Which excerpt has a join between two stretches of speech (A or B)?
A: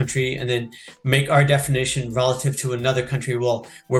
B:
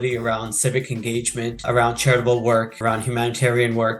B